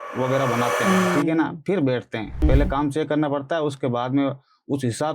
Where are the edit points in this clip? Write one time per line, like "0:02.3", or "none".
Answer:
0:02.4